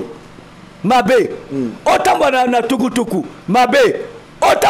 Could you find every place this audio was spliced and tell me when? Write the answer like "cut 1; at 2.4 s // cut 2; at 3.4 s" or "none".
none